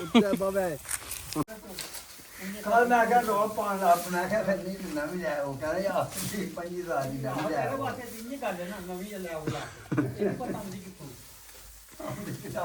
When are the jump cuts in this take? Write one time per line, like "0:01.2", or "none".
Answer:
0:01.5